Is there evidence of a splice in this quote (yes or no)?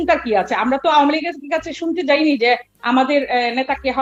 no